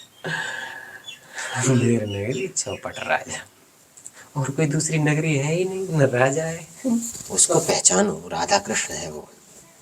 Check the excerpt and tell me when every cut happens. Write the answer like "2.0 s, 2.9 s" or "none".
7.5 s